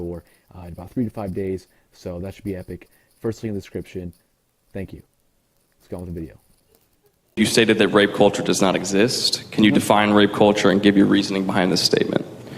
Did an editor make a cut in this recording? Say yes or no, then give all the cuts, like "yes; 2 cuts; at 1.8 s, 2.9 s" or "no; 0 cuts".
yes; 1 cut; at 2.5 s